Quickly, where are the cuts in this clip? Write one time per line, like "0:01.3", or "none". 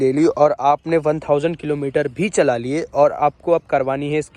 none